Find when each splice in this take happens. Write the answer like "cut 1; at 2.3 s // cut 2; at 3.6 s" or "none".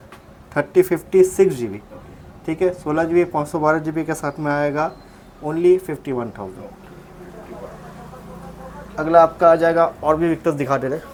none

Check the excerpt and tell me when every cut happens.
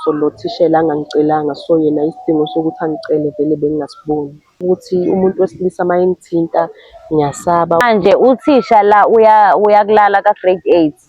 cut 1; at 4.6 s // cut 2; at 7.8 s

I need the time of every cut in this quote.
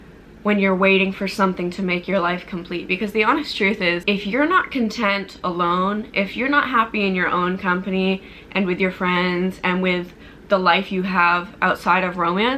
cut 1; at 4.0 s

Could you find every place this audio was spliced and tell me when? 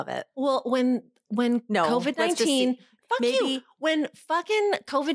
none

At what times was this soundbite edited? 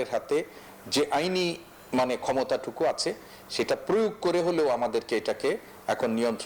none

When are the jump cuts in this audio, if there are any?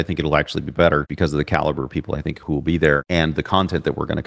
cut 1; at 1.1 s // cut 2; at 3.0 s

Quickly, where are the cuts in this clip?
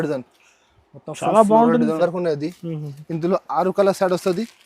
cut 1; at 2.0 s

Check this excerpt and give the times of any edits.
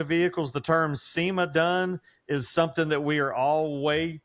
none

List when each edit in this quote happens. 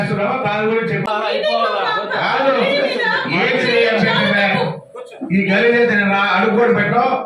cut 1; at 1.1 s

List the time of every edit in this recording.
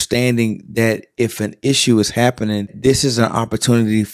cut 1; at 2.7 s

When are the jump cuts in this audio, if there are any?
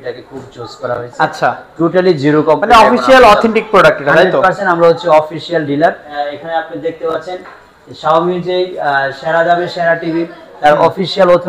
cut 1; at 6.0 s

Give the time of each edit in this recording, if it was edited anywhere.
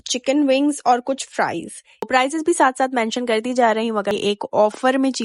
cut 1; at 2.1 s // cut 2; at 4.1 s

